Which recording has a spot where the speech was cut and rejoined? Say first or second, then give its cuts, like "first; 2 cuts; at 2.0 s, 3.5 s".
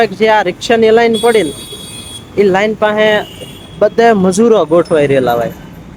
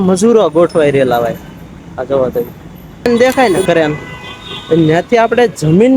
second; 1 cut; at 3.1 s